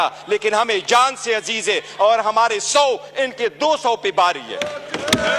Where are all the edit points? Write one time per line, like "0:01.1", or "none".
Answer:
none